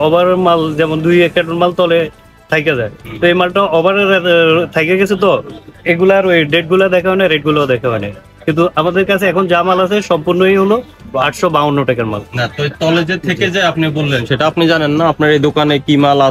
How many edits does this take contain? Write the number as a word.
zero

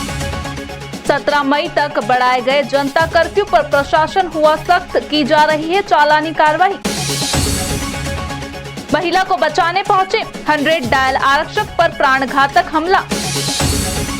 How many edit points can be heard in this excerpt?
zero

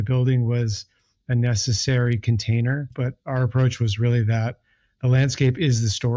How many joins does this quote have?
one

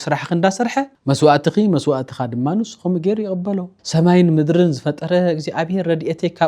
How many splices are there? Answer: two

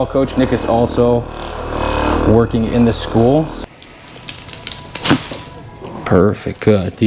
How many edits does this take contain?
one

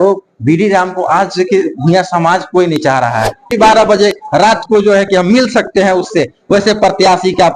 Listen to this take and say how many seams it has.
one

